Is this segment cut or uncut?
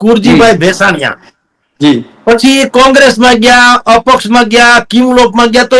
uncut